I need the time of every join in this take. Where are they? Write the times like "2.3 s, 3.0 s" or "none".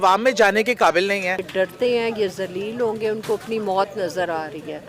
1.5 s